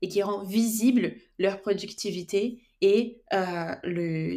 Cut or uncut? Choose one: uncut